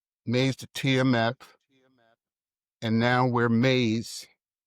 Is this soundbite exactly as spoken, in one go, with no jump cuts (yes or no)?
yes